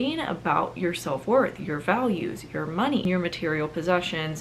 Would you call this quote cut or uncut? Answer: cut